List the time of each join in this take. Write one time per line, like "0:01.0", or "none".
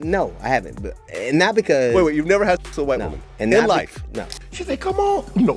0:04.5